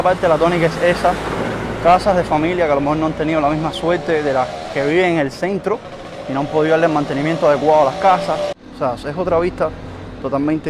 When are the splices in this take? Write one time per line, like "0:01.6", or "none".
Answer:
0:08.6